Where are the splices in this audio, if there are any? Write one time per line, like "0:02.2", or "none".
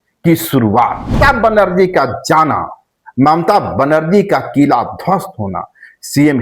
0:01.2